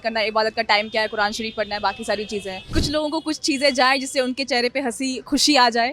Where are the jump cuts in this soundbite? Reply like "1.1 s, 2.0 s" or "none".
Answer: 2.6 s